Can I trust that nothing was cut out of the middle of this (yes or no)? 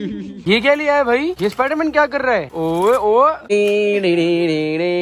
no